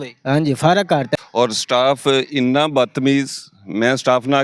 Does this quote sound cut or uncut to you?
cut